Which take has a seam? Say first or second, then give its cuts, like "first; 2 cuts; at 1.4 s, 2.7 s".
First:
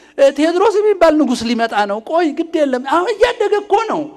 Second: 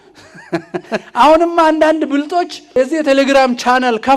second; 2 cuts; at 1.1 s, 2.8 s